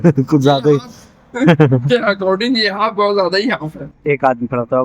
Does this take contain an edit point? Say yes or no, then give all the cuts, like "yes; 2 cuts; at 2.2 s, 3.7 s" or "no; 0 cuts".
yes; 1 cut; at 3.9 s